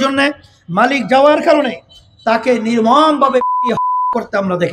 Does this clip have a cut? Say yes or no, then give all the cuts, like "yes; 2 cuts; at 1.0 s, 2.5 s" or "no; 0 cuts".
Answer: no; 0 cuts